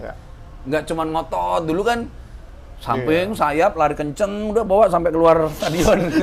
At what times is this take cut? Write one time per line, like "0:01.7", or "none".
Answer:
none